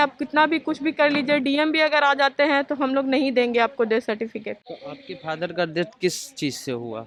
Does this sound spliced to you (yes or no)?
no